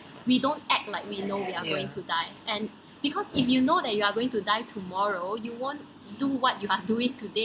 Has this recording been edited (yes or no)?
no